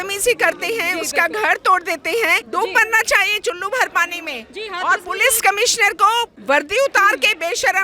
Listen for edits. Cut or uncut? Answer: cut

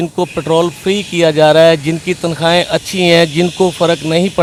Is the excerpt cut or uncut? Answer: uncut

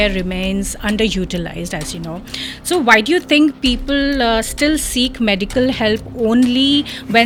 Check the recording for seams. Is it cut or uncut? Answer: uncut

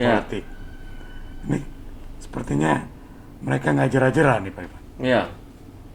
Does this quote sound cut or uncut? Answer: uncut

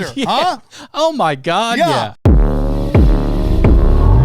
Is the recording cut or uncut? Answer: cut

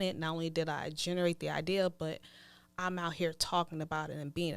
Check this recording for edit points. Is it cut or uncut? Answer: uncut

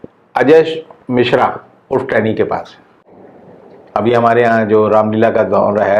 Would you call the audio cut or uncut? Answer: uncut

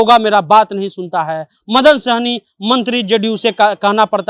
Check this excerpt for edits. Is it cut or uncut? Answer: uncut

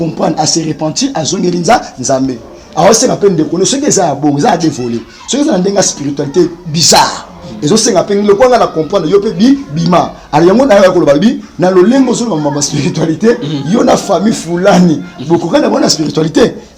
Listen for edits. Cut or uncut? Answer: uncut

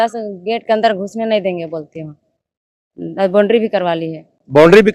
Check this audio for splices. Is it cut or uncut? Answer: uncut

